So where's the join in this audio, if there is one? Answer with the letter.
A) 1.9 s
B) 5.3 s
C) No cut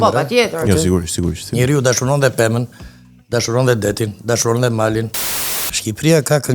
B